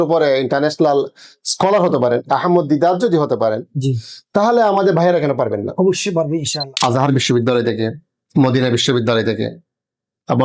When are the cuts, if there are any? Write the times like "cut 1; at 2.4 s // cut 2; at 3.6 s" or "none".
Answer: cut 1; at 6.7 s